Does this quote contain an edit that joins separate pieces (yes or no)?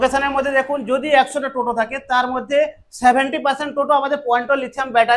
no